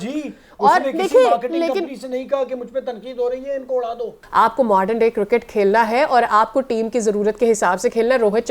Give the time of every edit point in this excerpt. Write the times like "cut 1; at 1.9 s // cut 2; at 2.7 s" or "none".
cut 1; at 4.1 s